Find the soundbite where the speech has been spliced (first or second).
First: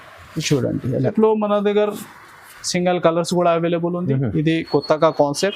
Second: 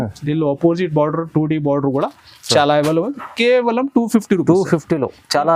first